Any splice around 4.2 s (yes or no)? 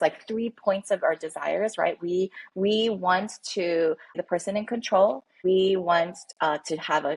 yes